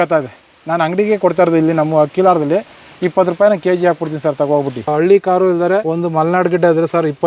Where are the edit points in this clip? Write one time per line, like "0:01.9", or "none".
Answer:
0:04.9
0:05.8